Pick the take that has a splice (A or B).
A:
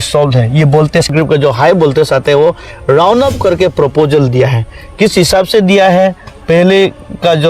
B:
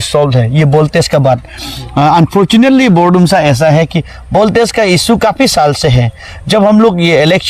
A